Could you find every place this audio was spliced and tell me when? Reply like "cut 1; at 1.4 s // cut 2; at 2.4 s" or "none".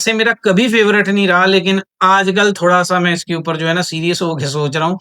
none